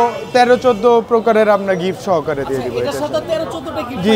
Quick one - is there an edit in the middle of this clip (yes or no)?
no